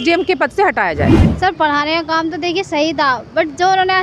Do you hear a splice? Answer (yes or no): yes